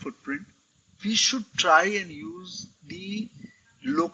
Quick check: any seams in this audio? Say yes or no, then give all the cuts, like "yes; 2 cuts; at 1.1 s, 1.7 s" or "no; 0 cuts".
no; 0 cuts